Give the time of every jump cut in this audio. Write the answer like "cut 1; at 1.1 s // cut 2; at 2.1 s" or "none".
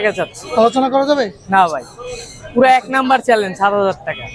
none